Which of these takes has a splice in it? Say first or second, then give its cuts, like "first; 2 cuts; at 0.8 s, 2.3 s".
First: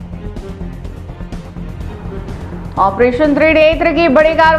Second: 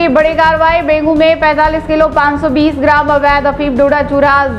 first; 1 cut; at 1.8 s